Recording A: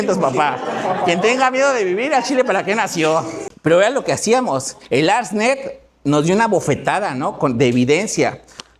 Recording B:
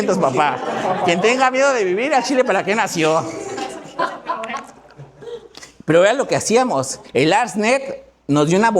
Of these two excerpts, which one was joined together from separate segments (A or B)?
A